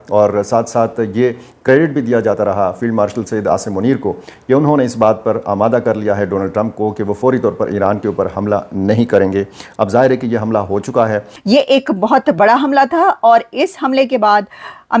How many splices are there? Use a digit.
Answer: 1